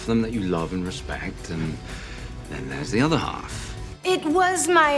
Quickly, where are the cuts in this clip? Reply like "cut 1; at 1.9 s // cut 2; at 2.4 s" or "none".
cut 1; at 3.9 s